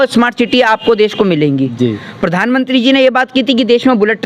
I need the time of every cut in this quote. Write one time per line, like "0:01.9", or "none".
none